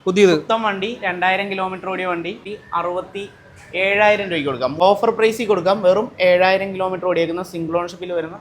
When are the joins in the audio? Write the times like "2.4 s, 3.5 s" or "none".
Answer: 2.4 s, 4.7 s